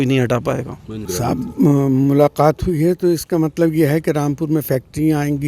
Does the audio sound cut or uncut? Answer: cut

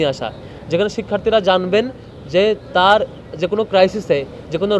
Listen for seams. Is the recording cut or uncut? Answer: uncut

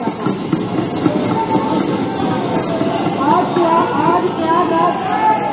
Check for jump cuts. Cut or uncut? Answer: uncut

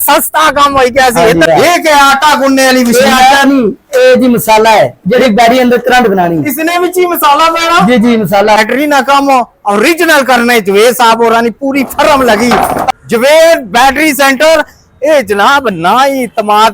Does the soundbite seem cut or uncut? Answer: cut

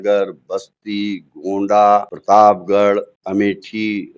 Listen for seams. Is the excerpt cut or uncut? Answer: cut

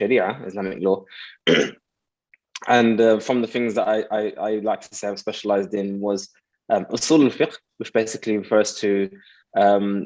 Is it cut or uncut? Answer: uncut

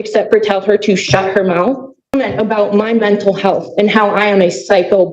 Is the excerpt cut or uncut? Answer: cut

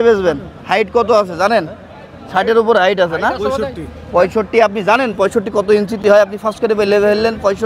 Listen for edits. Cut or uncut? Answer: uncut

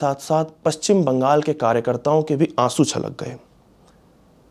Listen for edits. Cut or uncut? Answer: uncut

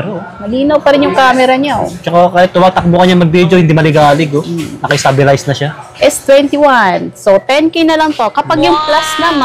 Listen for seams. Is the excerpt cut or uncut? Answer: uncut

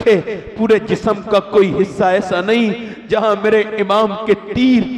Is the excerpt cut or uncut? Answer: uncut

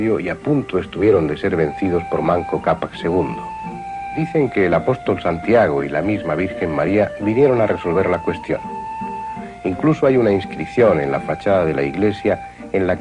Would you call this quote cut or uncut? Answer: uncut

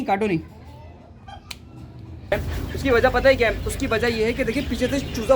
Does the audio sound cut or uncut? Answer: cut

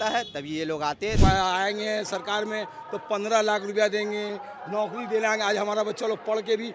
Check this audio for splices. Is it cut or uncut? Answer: cut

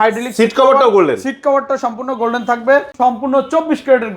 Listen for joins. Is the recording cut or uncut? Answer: cut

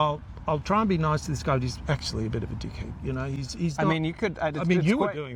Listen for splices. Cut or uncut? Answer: uncut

